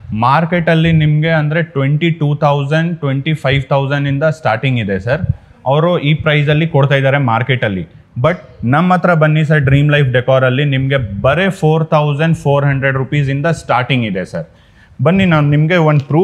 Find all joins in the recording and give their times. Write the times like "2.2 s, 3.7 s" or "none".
none